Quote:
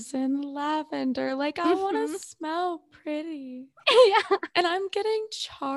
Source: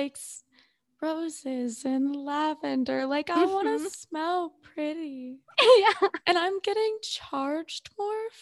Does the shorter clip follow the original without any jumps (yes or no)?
yes